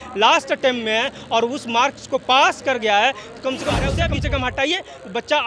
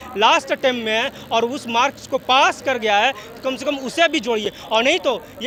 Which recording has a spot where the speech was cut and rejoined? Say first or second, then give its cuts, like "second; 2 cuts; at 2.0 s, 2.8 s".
first; 1 cut; at 3.9 s